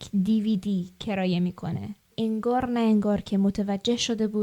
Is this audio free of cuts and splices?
no; 1 cut; at 2.1 s

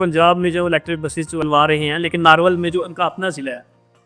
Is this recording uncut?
no; 1 cut; at 1.4 s

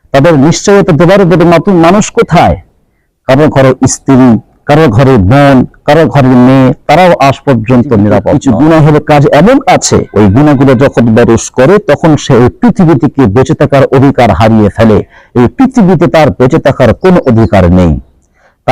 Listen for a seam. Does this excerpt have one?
yes; 2 cuts; at 8.3 s, 10.1 s

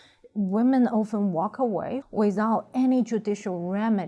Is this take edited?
yes; 1 cut; at 2.0 s

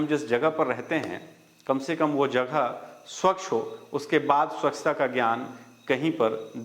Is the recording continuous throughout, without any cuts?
yes; 0 cuts

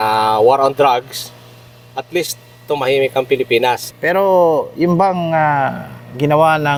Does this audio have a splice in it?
no; 0 cuts

